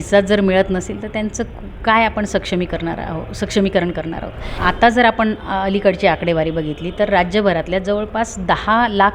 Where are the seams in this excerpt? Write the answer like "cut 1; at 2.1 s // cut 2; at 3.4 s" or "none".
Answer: cut 1; at 4.6 s